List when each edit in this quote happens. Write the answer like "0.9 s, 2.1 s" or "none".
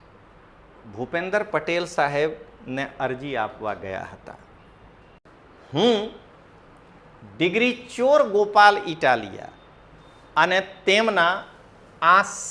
5.2 s